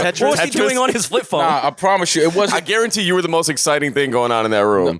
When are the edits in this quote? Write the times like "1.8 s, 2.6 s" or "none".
none